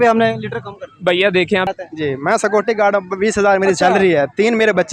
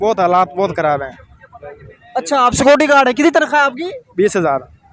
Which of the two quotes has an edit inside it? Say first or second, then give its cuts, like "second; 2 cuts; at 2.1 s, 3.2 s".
first; 1 cut; at 1.7 s